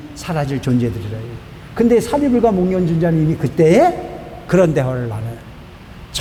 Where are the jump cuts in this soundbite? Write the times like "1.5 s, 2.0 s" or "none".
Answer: none